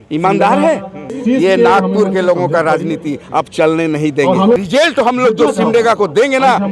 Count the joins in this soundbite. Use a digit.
2